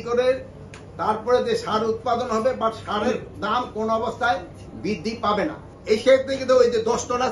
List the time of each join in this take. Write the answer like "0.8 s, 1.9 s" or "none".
5.7 s